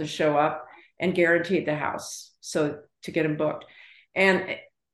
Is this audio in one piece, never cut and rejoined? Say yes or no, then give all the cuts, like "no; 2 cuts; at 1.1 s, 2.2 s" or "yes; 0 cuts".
yes; 0 cuts